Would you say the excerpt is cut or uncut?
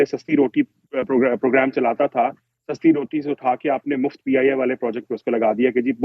uncut